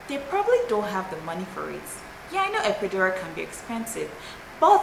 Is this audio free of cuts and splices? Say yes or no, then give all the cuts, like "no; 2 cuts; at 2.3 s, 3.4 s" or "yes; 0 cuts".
yes; 0 cuts